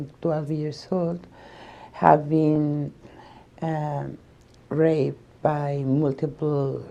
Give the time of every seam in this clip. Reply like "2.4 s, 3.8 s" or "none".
none